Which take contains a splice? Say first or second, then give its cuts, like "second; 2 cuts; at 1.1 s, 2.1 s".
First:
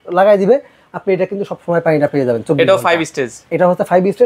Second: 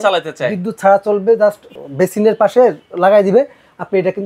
second; 1 cut; at 1.7 s